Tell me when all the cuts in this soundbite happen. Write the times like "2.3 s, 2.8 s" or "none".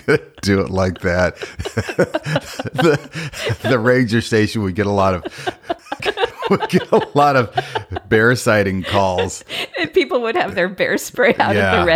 5.9 s